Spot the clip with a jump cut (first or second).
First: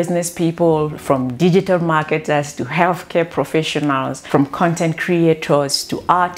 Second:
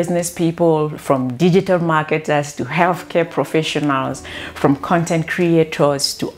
first